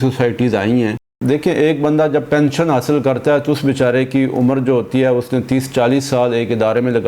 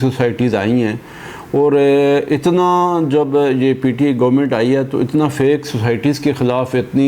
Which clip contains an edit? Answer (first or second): first